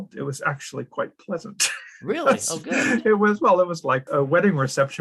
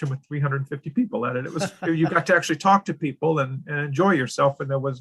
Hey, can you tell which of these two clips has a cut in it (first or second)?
first